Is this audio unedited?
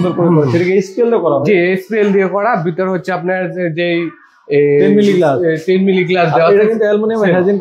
yes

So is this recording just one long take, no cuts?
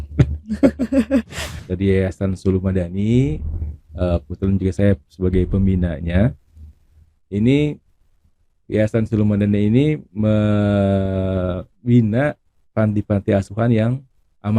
no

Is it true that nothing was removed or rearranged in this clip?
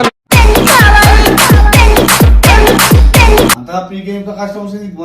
no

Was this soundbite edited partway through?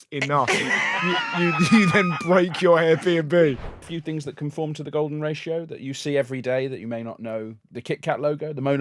yes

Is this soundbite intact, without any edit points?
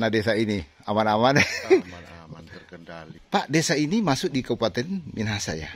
no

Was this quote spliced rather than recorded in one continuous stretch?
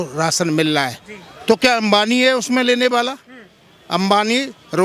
no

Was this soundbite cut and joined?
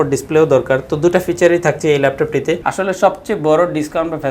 yes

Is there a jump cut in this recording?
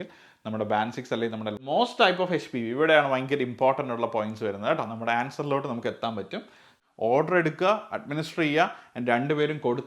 yes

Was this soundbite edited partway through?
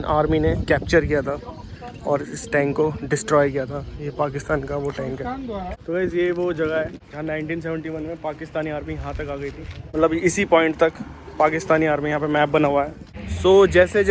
yes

